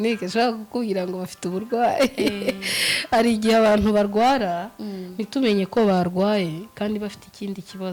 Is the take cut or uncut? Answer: uncut